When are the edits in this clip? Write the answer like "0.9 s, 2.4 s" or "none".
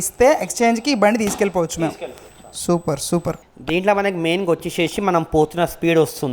none